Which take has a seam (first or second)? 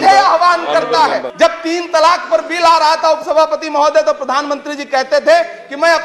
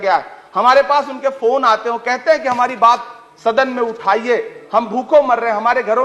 first